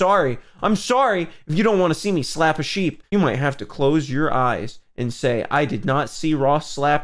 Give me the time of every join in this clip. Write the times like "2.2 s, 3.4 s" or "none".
3.0 s